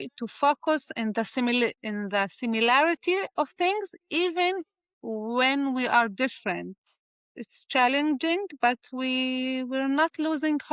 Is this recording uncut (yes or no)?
no